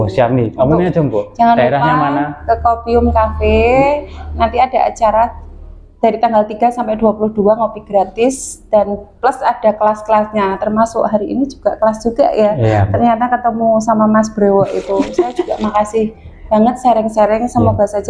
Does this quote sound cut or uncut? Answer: uncut